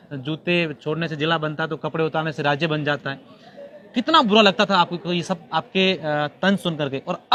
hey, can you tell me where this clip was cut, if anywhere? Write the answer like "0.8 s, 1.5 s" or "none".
none